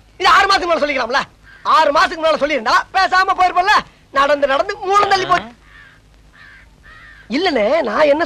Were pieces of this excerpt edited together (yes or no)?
yes